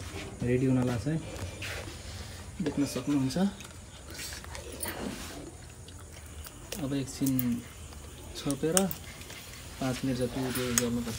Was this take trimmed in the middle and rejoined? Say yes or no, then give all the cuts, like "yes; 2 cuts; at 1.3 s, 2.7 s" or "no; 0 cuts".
no; 0 cuts